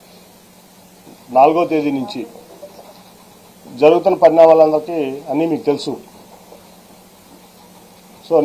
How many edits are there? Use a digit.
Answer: 1